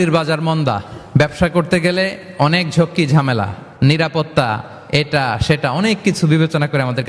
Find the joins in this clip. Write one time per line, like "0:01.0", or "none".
none